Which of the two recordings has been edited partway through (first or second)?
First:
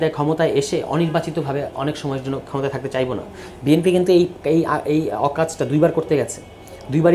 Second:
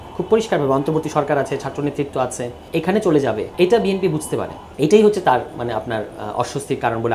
second